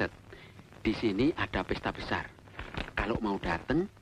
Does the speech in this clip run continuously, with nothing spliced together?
yes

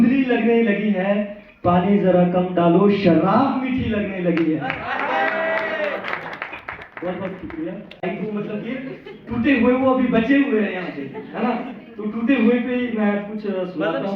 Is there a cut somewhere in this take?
yes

